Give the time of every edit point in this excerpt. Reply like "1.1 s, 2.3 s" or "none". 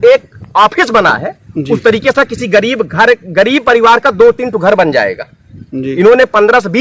none